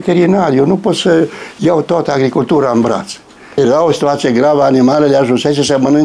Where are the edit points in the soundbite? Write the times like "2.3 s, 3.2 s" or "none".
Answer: 3.6 s

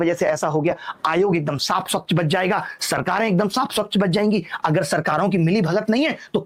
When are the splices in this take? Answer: none

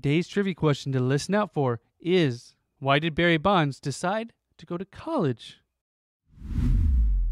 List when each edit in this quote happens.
5.9 s

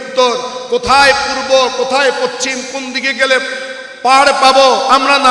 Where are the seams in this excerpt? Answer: none

